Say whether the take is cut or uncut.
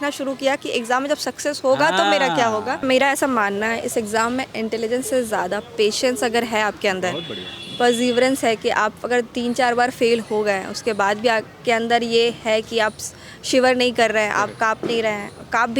uncut